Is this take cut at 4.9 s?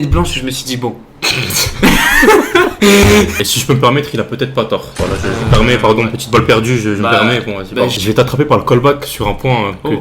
no; 2 cuts; at 3.3 s, 7.9 s

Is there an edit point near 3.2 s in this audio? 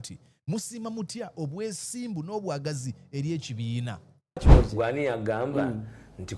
no; 1 cut; at 4.5 s

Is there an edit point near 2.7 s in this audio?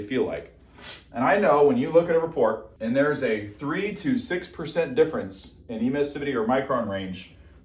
yes; 1 cut; at 2.7 s

